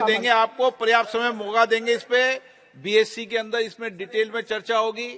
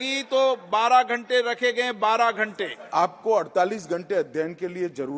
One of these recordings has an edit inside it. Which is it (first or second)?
second